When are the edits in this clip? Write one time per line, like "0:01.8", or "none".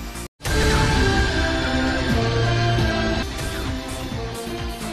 none